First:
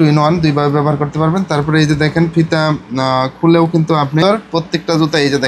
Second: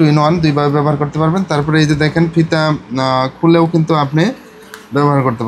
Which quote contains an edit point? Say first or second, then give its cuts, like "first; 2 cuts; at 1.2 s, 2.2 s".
first; 1 cut; at 4.2 s